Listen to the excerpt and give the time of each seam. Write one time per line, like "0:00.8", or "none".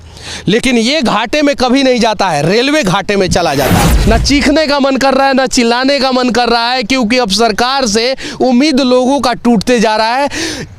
0:03.9